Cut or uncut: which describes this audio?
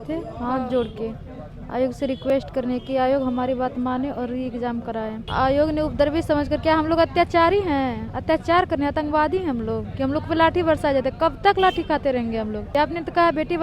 cut